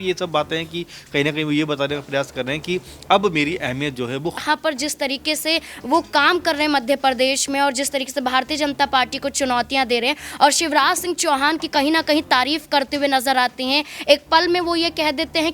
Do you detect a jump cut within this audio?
yes; 1 cut; at 4.4 s

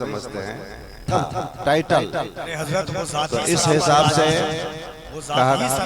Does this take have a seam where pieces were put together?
yes; 1 cut; at 1.1 s

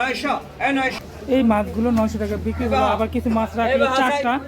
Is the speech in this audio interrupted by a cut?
yes; 1 cut; at 1.0 s

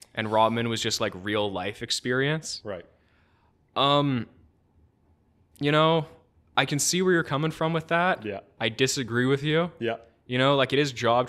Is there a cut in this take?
no; 0 cuts

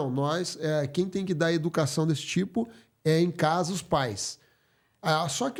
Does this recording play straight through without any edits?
yes; 0 cuts

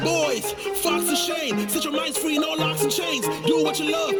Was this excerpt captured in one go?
yes; 0 cuts

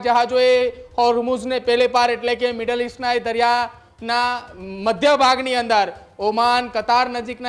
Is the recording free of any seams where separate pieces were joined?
yes; 0 cuts

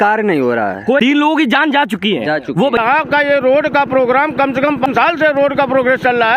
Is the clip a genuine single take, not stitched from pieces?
no; 3 cuts; at 1.0 s, 2.8 s, 4.9 s

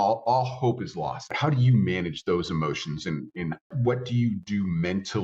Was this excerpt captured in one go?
no; 2 cuts; at 1.3 s, 3.7 s

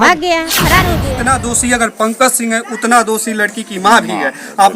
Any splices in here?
yes; 1 cut; at 1.0 s

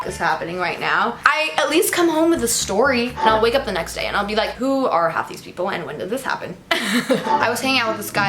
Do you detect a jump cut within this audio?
yes; 2 cuts; at 3.1 s, 7.3 s

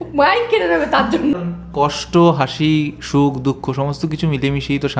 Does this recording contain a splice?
yes; 1 cut; at 1.3 s

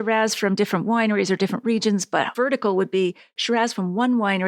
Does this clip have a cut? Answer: no; 0 cuts

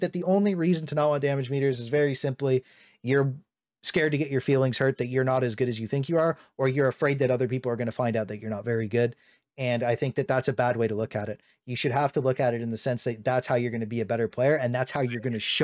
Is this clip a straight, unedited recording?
yes; 0 cuts

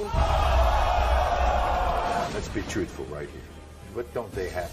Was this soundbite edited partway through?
yes; 1 cut; at 2.3 s

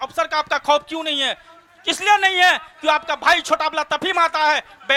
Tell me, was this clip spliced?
no; 0 cuts

